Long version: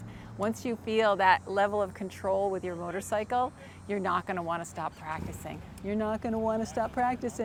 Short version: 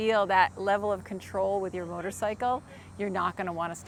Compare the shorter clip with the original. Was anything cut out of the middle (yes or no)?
no